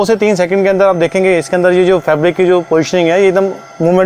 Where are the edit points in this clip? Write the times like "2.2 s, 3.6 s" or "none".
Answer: none